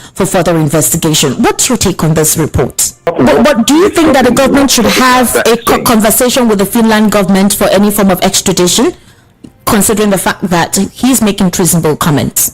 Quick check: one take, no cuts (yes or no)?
no